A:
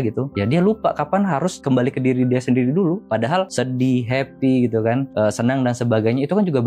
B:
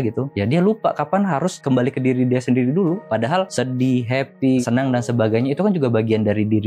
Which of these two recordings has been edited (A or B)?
B